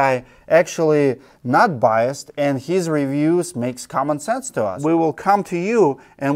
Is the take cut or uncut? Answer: cut